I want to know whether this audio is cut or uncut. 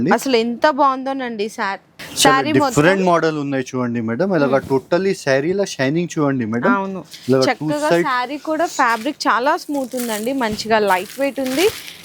uncut